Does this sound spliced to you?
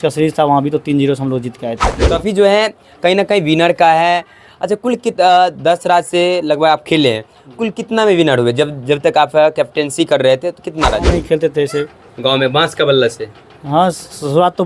yes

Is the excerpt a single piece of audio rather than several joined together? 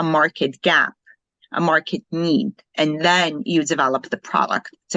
yes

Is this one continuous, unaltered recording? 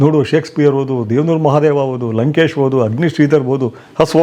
yes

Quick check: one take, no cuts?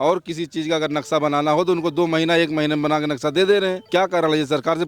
no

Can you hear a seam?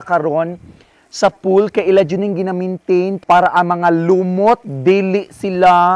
yes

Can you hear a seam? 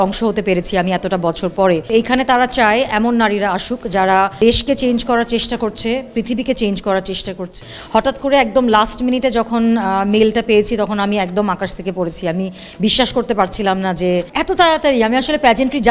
yes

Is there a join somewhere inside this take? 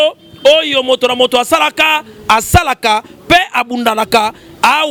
no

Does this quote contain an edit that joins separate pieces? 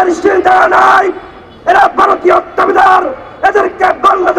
no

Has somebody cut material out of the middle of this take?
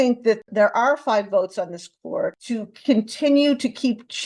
yes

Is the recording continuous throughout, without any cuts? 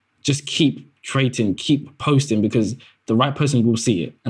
yes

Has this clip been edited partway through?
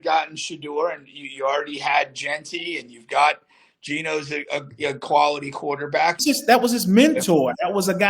yes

